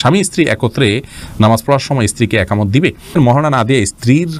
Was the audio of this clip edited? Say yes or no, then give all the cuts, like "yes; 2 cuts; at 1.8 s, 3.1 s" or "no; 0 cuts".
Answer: yes; 1 cut; at 3.1 s